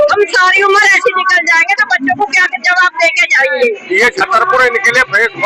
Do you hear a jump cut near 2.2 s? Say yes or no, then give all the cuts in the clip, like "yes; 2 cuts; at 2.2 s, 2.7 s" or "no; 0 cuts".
no; 1 cut; at 3.8 s